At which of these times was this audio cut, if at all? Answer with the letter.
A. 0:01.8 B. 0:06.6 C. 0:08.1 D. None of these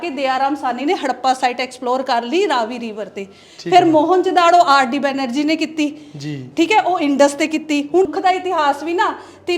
C